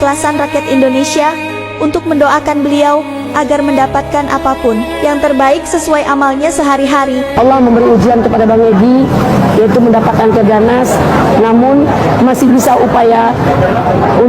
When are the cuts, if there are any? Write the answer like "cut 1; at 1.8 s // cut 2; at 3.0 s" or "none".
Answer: cut 1; at 7.3 s